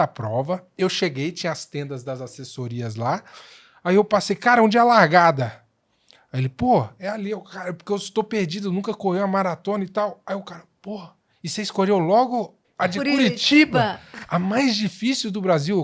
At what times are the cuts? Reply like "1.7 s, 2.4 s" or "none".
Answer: none

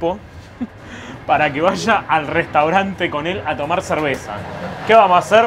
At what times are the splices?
none

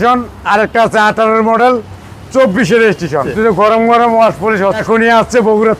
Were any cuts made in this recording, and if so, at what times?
3.3 s, 4.8 s

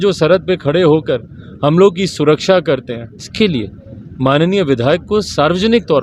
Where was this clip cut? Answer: 3.3 s

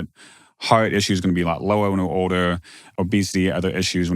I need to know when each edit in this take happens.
2.8 s

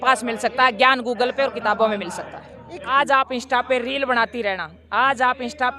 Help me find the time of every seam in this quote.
2.9 s

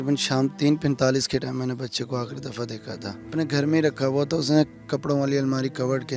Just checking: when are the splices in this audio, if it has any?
3.2 s

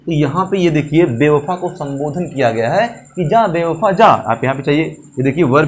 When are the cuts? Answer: none

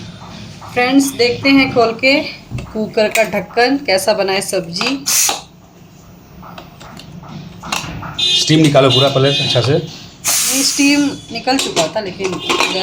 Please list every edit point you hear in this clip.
none

